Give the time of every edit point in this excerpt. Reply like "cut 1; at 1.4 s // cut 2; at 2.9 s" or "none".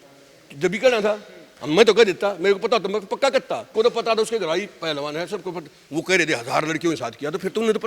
cut 1; at 3.6 s